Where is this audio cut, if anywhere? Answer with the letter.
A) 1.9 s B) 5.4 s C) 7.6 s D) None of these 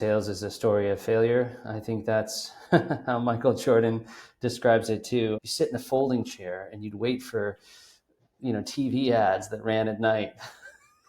B